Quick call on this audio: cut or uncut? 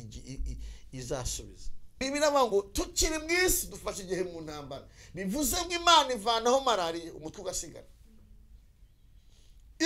cut